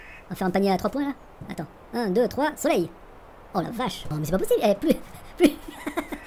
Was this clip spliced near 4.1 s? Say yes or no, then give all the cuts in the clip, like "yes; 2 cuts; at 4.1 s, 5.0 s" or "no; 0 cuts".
yes; 1 cut; at 4.1 s